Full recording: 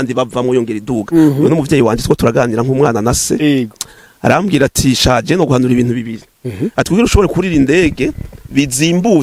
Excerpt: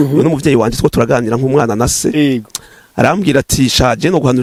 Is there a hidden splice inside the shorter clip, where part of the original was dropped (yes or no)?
no